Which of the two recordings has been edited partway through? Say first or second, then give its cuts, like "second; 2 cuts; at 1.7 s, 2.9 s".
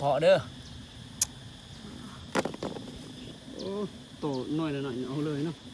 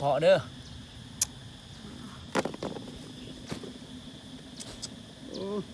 first; 1 cut; at 3.3 s